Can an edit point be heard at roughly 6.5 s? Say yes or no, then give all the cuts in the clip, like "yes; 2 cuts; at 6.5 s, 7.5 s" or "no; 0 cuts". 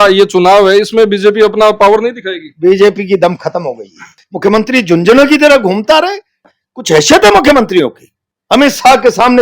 yes; 2 cuts; at 4.2 s, 6.5 s